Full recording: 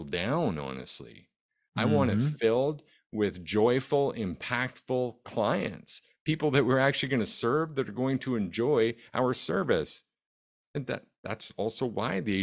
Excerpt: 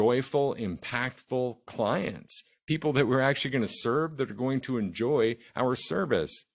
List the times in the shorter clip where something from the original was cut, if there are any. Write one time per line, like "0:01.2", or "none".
none